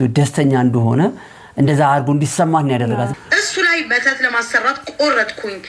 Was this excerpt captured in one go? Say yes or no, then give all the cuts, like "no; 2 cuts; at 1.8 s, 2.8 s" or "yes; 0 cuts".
no; 1 cut; at 3.1 s